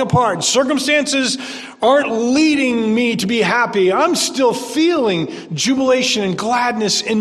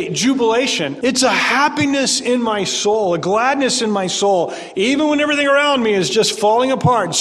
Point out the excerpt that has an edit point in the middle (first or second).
second